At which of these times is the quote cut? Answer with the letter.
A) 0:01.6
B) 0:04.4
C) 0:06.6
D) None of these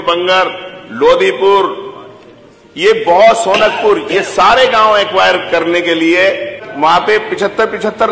C